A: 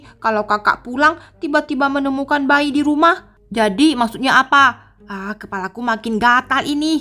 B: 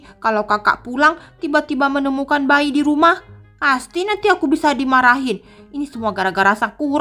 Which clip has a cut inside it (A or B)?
A